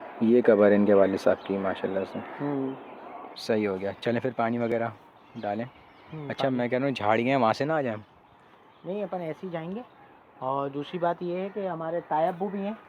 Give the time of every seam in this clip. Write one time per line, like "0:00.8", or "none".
none